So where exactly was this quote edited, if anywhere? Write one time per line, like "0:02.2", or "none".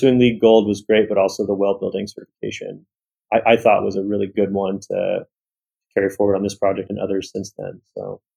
0:04.3
0:06.9